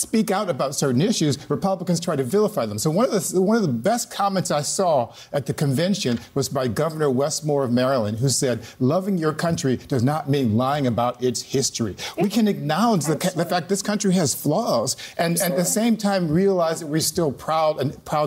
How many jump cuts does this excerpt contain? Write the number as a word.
zero